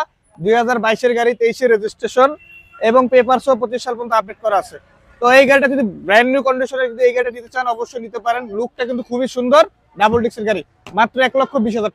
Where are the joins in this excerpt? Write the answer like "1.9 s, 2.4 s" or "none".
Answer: none